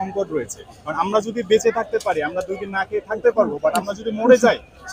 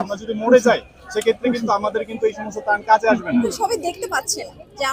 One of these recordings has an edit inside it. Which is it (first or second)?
second